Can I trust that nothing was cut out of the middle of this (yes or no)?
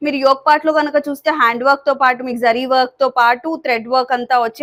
yes